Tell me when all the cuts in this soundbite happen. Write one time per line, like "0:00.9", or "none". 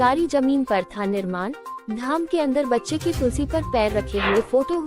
none